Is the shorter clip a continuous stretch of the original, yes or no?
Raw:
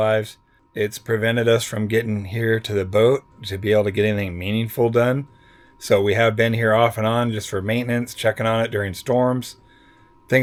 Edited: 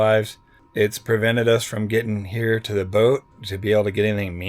yes